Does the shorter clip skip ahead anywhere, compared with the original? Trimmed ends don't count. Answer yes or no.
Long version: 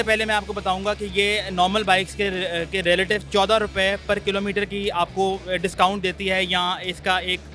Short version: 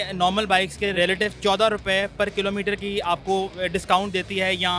yes